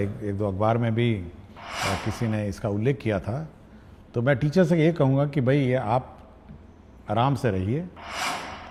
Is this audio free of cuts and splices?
yes; 0 cuts

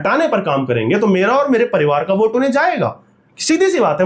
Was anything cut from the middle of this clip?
no; 0 cuts

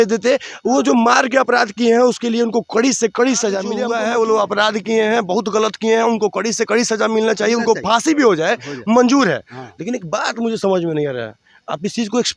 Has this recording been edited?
yes; 1 cut; at 3.8 s

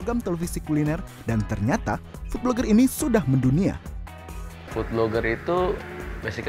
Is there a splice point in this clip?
no; 0 cuts

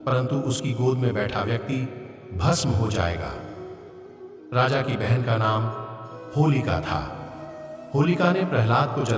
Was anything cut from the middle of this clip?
no; 0 cuts

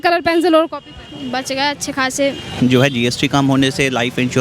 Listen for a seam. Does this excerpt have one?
yes; 1 cut; at 2.6 s

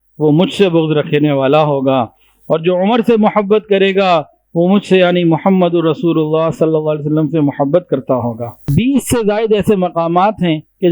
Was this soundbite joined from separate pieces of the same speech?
yes; 1 cut; at 8.6 s

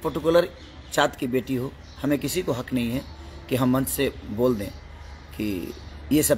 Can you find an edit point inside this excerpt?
no; 0 cuts

